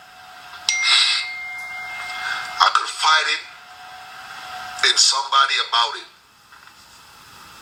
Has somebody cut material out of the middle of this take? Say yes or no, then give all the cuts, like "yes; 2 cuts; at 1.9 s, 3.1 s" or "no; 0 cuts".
no; 0 cuts